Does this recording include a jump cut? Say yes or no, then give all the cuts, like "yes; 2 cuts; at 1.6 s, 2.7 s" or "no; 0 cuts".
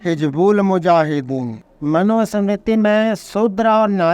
yes; 1 cut; at 1.6 s